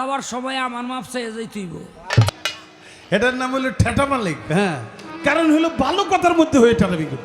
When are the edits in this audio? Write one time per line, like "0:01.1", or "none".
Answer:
0:02.3